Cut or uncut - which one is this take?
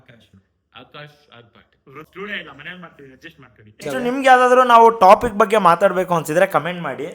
cut